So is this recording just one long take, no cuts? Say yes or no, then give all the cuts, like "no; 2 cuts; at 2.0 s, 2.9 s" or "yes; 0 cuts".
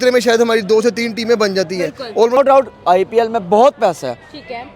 no; 1 cut; at 2.4 s